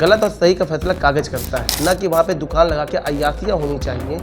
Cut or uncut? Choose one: cut